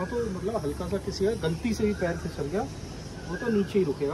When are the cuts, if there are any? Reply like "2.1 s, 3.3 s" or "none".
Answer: none